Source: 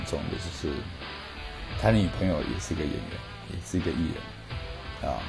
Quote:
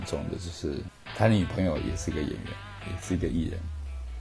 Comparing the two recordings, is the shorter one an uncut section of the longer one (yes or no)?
no